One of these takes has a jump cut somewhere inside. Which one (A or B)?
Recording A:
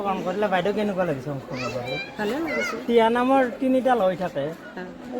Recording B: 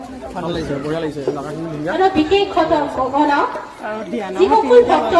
A